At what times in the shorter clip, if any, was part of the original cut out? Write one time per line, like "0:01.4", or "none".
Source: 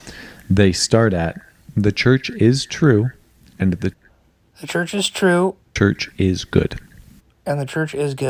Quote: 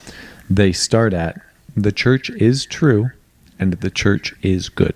0:04.0